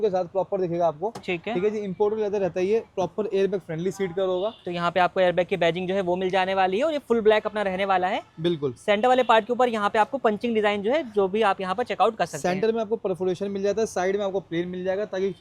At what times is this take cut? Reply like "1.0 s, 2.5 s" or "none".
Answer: none